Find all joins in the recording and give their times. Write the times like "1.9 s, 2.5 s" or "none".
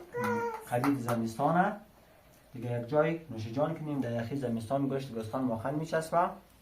4.0 s